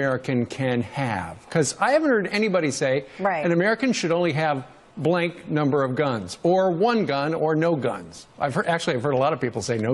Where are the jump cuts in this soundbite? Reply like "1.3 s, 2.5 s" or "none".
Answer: 6.1 s